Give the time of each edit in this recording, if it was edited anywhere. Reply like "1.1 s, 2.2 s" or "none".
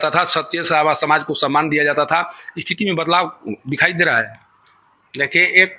none

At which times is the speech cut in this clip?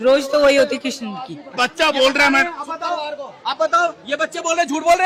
none

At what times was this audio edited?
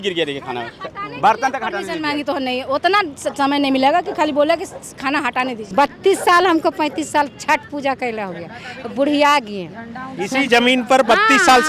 5.6 s

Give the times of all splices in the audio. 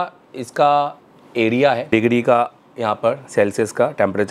1.8 s

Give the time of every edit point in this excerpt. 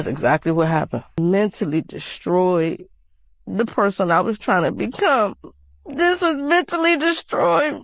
1.1 s

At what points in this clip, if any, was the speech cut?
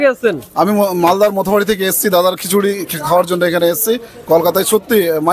none

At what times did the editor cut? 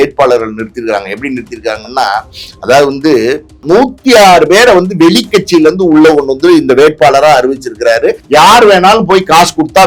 3.6 s, 8.2 s

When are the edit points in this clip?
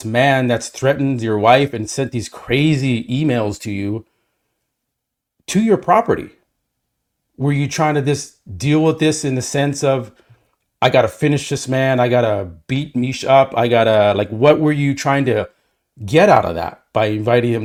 none

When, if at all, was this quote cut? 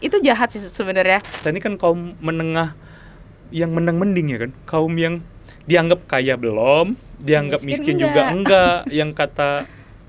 1.4 s

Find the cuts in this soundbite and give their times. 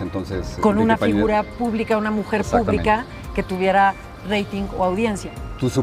none

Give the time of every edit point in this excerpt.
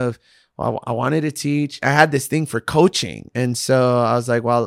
1.8 s

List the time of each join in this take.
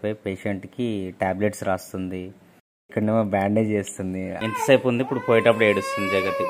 2.9 s, 4.3 s

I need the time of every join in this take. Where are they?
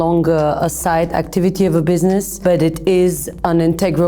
2.3 s

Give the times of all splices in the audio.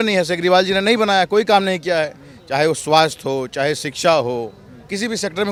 none

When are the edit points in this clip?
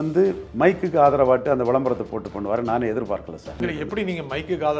3.6 s

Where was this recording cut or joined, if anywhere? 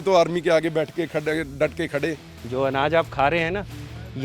2.4 s

